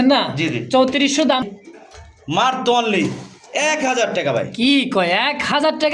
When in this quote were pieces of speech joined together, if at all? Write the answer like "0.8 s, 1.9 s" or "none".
1.4 s

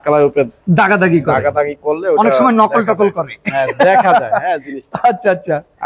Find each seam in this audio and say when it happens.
none

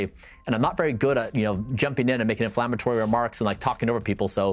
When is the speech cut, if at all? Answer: none

